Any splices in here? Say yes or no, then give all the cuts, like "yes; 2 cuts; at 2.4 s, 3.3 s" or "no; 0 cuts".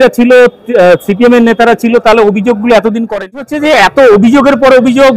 yes; 1 cut; at 3.5 s